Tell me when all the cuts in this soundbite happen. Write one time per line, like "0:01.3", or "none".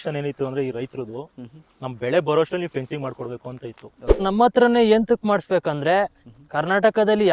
0:04.2